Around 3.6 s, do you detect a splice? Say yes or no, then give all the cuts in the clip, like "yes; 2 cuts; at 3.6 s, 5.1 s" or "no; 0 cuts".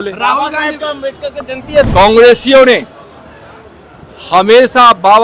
no; 1 cut; at 1.9 s